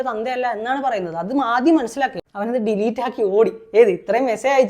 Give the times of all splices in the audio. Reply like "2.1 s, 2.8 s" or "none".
2.2 s